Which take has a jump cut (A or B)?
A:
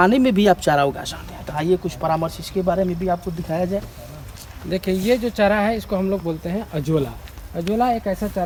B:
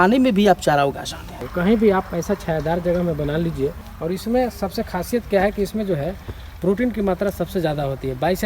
B